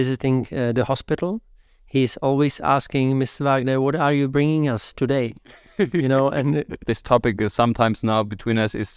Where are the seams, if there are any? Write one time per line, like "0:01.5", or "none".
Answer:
0:06.8